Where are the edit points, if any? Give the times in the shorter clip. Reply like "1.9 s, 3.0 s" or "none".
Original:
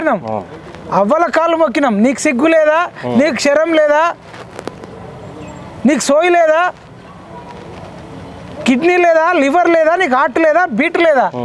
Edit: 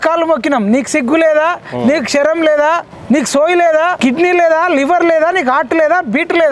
2.9 s, 4.0 s